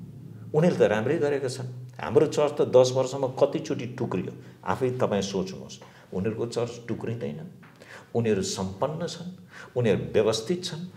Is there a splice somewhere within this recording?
no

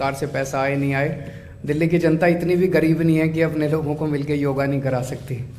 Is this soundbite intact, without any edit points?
yes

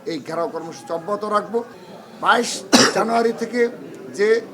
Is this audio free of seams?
no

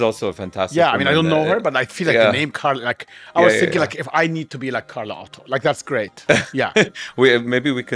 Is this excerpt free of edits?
yes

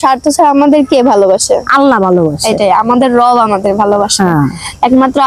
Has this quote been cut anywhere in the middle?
no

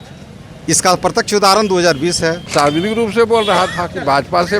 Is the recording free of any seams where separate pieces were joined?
no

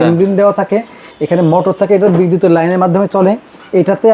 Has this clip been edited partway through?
no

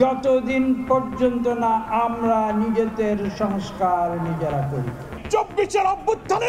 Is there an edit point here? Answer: yes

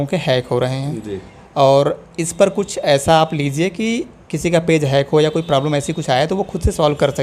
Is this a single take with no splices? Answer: yes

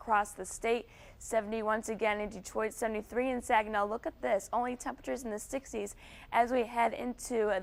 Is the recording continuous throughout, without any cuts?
yes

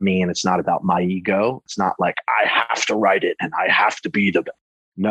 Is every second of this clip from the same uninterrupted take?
no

